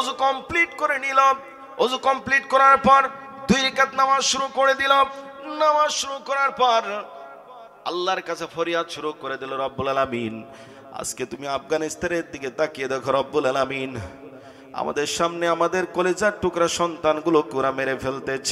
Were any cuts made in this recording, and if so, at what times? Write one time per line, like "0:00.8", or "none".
none